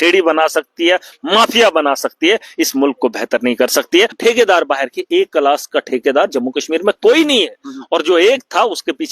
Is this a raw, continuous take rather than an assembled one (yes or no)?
no